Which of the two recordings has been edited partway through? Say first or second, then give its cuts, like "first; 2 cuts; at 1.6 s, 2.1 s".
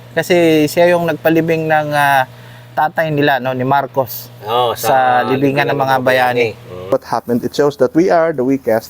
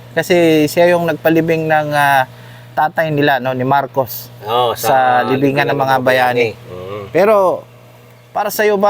first; 1 cut; at 6.9 s